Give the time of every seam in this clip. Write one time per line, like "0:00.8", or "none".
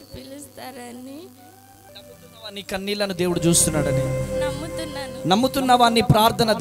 0:01.8